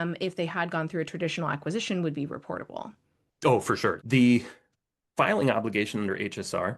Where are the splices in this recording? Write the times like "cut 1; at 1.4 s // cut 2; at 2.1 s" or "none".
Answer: cut 1; at 4.0 s